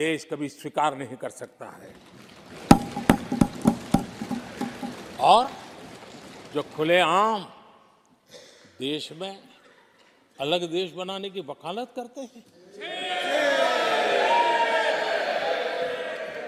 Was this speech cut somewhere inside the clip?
no; 0 cuts

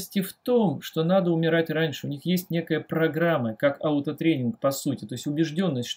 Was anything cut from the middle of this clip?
no; 0 cuts

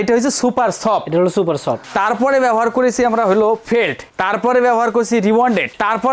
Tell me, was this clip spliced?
no; 0 cuts

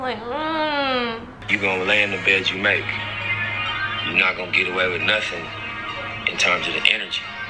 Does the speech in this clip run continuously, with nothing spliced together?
no; 1 cut; at 1.5 s

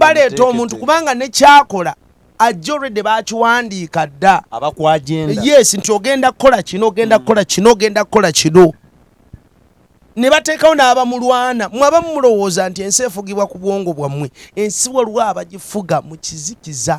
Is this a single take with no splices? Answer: yes; 0 cuts

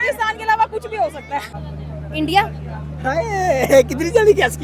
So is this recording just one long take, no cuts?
no; 1 cut; at 1.6 s

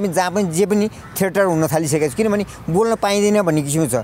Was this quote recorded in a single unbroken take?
yes; 0 cuts

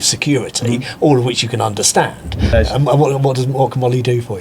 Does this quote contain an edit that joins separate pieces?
yes; 1 cut; at 2.5 s

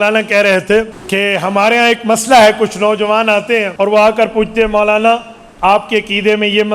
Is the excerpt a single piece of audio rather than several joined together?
no; 2 cuts; at 1.0 s, 3.7 s

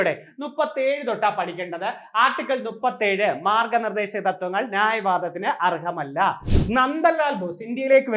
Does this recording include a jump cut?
yes; 1 cut; at 6.4 s

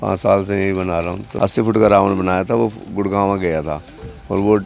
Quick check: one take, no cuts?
no; 1 cut; at 1.2 s

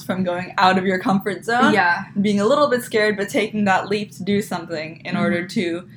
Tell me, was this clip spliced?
no; 0 cuts

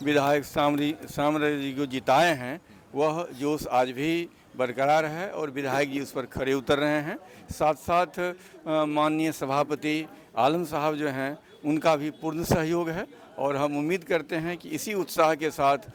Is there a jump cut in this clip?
no; 0 cuts

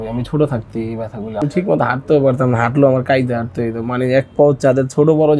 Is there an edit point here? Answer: yes; 1 cut; at 1.3 s

